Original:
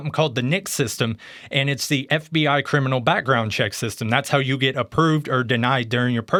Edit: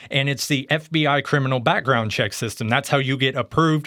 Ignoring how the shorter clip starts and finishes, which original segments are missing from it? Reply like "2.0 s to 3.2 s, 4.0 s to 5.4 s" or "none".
none